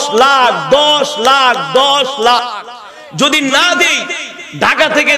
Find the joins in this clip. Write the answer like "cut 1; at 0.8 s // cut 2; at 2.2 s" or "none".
cut 1; at 2.4 s